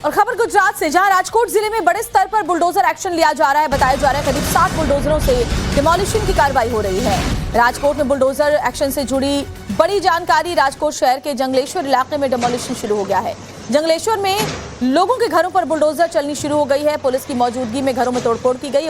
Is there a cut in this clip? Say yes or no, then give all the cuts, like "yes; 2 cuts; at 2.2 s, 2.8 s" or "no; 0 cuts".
yes; 1 cut; at 10.2 s